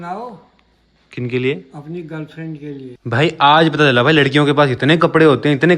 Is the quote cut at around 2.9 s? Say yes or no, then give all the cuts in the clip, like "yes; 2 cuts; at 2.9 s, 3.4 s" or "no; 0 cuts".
yes; 1 cut; at 2.9 s